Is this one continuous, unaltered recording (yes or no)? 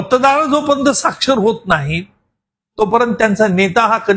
yes